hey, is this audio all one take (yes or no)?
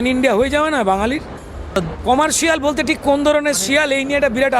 no